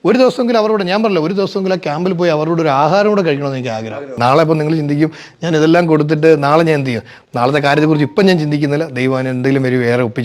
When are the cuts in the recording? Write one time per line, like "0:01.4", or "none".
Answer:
0:04.1